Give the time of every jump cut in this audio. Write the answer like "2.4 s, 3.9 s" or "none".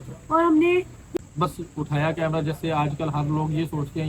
1.0 s